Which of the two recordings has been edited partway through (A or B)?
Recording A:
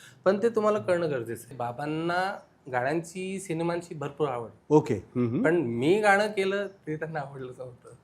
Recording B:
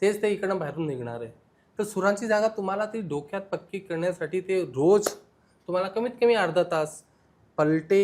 A